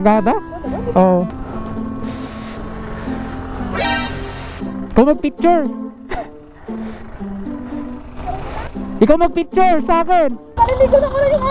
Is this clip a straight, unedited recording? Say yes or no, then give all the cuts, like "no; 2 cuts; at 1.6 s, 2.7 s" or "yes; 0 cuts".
no; 1 cut; at 1.3 s